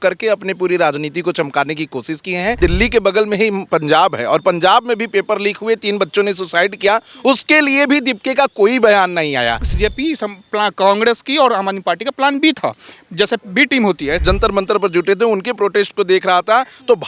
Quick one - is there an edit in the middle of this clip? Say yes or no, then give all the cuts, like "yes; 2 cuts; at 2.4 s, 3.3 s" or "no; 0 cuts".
yes; 3 cuts; at 2.6 s, 9.7 s, 14.2 s